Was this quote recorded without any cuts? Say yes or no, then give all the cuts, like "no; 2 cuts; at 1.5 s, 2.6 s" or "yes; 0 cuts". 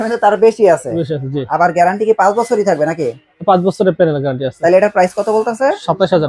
yes; 0 cuts